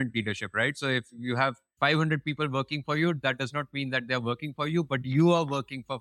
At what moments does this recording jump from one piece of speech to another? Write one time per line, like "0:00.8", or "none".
none